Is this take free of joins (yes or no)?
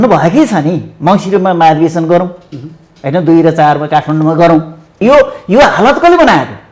no